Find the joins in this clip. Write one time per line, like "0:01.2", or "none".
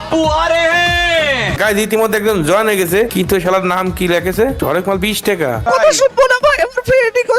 0:01.5
0:03.1
0:04.6
0:05.7